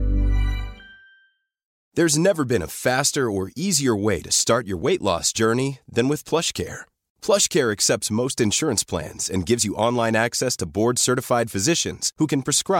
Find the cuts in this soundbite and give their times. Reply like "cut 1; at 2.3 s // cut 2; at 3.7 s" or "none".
cut 1; at 1.7 s